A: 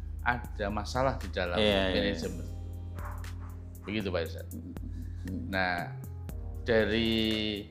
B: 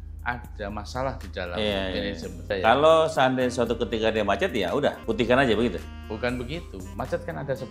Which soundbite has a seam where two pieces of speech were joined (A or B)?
B